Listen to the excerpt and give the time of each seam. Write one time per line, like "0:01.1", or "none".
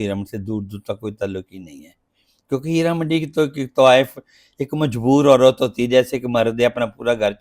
none